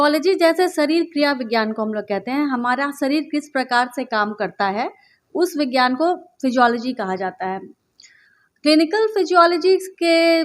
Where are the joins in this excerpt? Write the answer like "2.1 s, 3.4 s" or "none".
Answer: 7.8 s